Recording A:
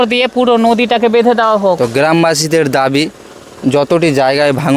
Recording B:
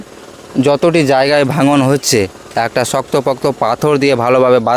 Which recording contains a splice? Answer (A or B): A